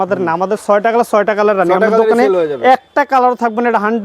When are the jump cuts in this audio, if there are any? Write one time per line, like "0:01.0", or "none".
none